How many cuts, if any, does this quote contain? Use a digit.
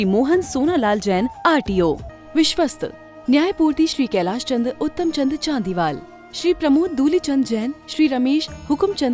1